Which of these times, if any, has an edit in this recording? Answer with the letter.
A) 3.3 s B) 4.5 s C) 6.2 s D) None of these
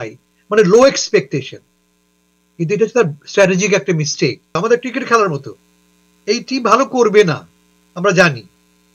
B